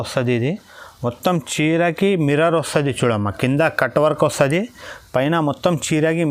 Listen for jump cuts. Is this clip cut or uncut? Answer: uncut